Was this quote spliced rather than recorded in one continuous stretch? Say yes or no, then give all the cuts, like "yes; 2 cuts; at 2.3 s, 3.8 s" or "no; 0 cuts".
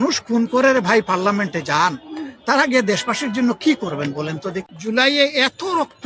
yes; 1 cut; at 4.7 s